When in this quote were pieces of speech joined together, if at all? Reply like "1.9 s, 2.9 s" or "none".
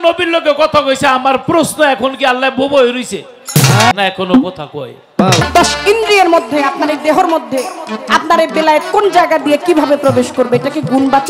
3.9 s, 5.4 s